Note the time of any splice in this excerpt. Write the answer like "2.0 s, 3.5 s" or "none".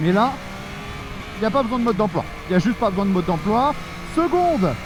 none

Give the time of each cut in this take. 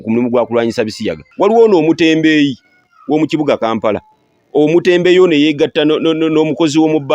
1.2 s

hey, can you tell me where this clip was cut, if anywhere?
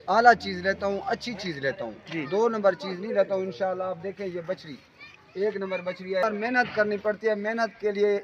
6.2 s

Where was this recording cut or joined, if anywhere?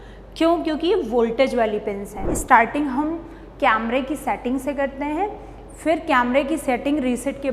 2.3 s

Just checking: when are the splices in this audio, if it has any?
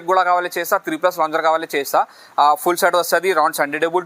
none

